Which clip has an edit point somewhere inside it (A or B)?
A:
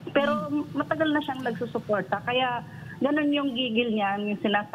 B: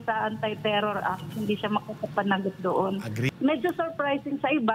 B